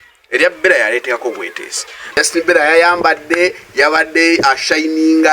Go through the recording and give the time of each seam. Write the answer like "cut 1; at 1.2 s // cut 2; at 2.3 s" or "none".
cut 1; at 1.9 s